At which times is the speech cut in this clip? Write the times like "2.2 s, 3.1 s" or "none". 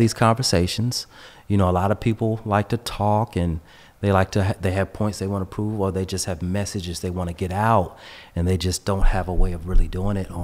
none